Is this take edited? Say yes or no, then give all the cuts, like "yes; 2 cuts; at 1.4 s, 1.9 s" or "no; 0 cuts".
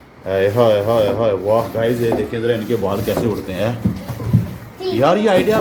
no; 0 cuts